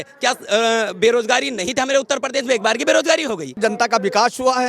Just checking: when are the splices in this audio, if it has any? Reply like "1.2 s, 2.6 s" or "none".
3.5 s